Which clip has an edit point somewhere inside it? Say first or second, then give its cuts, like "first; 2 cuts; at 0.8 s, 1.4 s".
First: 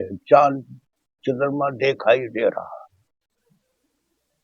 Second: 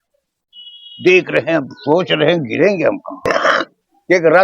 second; 1 cut; at 3.3 s